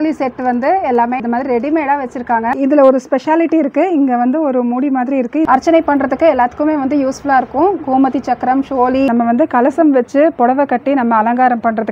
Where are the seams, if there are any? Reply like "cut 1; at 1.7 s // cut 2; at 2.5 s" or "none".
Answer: cut 1; at 2.5 s // cut 2; at 5.5 s // cut 3; at 9.1 s